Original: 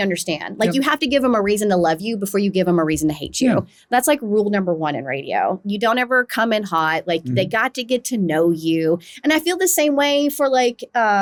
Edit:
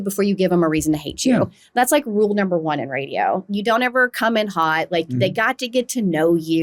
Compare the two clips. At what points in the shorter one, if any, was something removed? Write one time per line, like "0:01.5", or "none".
none

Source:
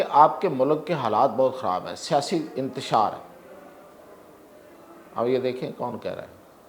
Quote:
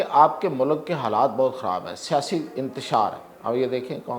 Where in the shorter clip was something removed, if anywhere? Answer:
0:03.3

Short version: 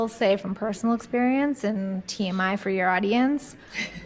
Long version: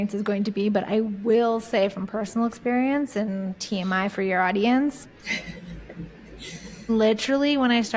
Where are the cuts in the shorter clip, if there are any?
none

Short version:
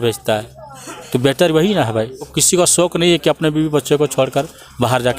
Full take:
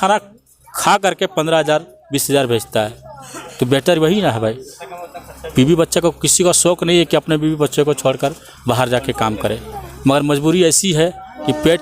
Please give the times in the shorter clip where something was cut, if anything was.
0:02.4

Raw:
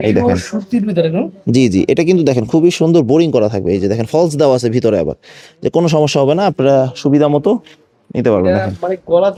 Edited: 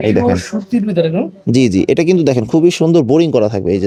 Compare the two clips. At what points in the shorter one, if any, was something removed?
none

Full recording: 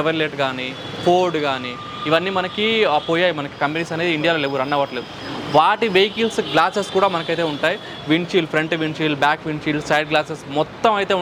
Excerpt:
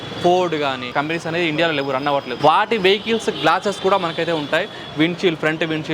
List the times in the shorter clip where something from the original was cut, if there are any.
0:00.9
0:02.3

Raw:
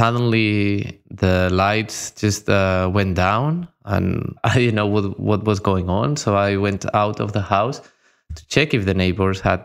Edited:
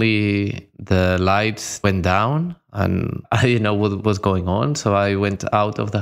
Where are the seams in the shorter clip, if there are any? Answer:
0:01.8
0:04.0

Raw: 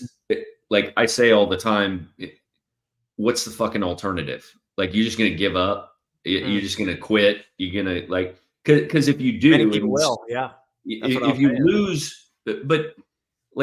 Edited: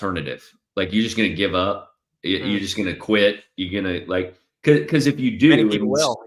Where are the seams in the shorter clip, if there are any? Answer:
none

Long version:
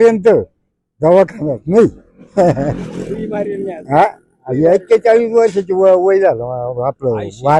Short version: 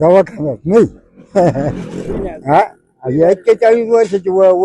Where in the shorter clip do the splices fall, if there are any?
0:02.2

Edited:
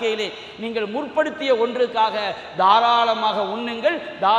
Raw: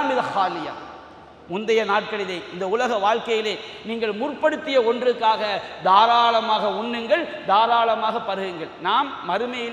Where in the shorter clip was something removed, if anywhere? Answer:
none

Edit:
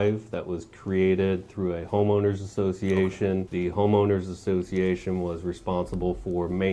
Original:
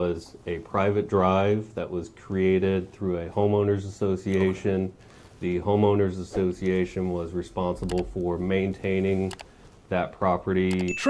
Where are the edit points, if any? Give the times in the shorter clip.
0:03.5

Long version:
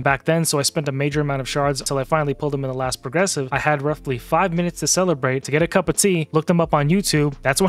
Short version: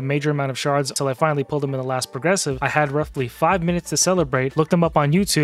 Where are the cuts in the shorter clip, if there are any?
0:04.5

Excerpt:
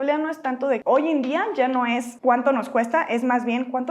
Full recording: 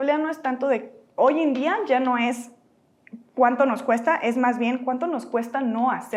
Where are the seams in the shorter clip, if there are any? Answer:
0:00.8
0:02.1

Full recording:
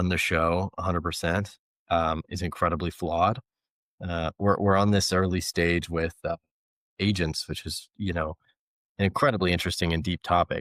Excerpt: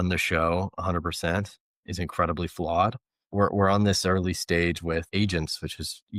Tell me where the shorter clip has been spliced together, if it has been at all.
0:01.8
0:03.3
0:05.1

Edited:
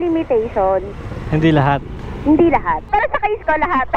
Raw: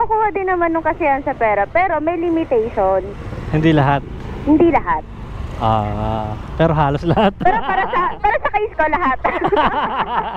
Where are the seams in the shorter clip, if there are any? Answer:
0:02.8

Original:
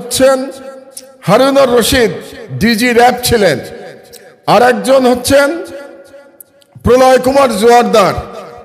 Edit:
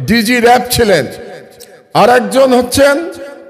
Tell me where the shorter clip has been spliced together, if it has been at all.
none

